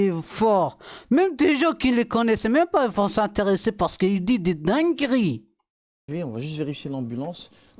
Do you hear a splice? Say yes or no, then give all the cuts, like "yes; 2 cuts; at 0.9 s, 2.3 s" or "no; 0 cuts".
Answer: no; 0 cuts